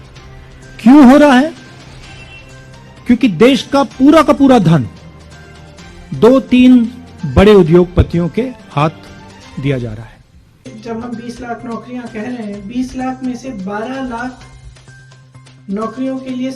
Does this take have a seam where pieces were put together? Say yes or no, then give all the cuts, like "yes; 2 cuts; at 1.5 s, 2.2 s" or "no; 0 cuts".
yes; 1 cut; at 10.7 s